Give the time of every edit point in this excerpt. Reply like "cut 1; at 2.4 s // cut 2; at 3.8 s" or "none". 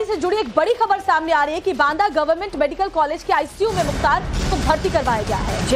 cut 1; at 3.4 s

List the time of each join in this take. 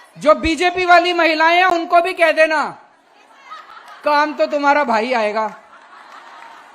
none

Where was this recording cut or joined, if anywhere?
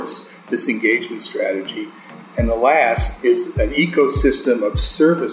cut 1; at 2.0 s // cut 2; at 3.5 s

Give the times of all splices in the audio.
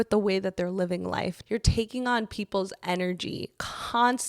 cut 1; at 1.4 s

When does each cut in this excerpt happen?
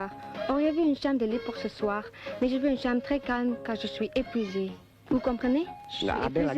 cut 1; at 5.4 s

